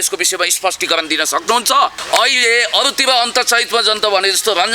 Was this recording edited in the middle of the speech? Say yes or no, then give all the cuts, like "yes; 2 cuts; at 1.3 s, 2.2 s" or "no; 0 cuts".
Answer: yes; 1 cut; at 2.0 s